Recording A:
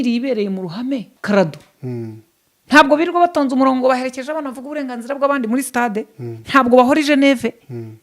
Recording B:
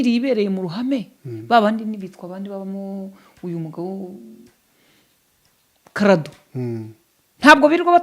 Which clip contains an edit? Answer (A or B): A